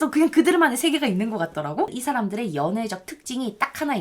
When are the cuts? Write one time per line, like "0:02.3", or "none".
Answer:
0:02.0